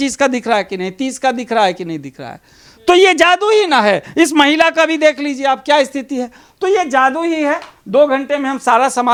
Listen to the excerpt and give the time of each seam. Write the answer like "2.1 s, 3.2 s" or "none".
none